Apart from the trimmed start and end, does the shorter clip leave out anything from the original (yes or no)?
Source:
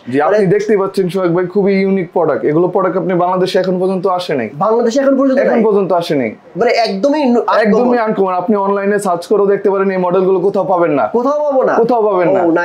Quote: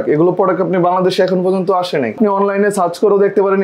yes